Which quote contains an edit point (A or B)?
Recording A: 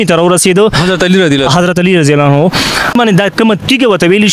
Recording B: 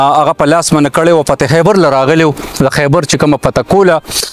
A